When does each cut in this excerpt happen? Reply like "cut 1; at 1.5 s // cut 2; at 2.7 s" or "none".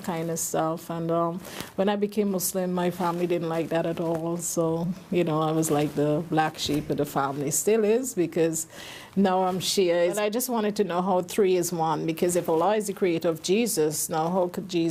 cut 1; at 5.8 s